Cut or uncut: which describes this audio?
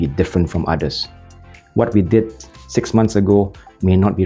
uncut